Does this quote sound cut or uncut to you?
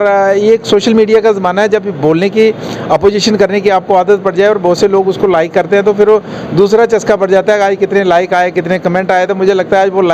uncut